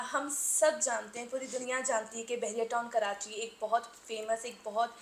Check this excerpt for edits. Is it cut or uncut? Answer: uncut